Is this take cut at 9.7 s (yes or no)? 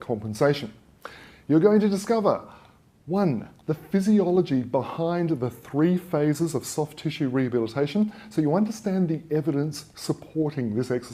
yes